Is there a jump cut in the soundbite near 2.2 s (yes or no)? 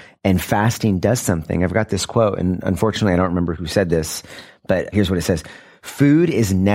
no